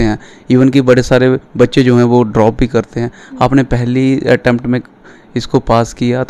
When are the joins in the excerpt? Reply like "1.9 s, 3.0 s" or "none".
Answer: none